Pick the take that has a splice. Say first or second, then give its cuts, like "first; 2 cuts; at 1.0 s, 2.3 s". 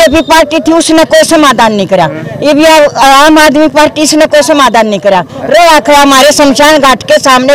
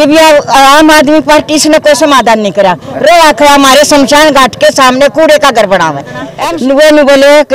second; 1 cut; at 6.3 s